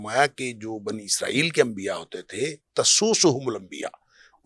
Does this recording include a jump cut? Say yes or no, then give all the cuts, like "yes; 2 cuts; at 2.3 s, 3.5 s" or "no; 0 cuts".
no; 0 cuts